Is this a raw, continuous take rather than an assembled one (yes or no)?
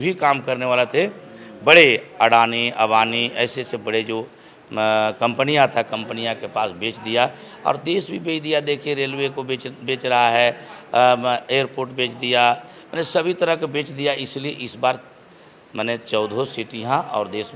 yes